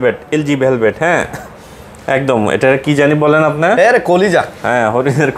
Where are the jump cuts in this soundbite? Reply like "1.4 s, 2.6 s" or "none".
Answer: none